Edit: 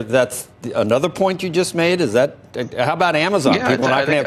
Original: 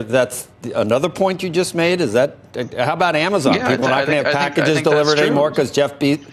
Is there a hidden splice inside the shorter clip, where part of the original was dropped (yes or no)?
no